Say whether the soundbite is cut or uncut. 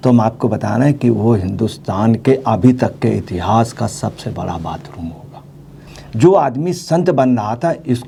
uncut